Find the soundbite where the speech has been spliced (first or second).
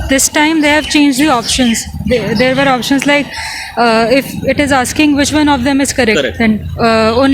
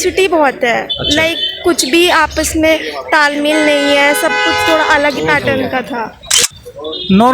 second